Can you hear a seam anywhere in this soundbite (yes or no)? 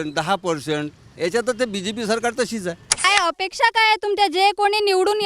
yes